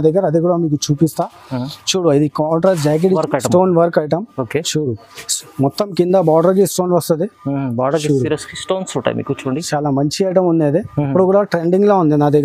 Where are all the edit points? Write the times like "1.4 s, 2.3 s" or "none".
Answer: 3.2 s